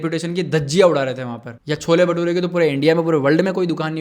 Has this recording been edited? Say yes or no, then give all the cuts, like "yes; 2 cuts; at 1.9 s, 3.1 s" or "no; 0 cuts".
yes; 1 cut; at 1.5 s